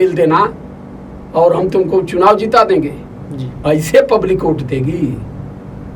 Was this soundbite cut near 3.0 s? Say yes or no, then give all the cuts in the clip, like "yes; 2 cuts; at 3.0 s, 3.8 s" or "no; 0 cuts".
yes; 1 cut; at 3.0 s